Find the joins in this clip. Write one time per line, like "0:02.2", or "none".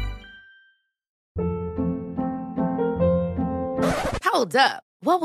0:01.2